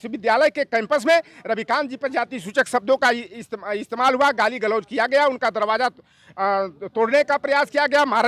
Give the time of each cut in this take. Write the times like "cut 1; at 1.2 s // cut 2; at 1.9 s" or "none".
none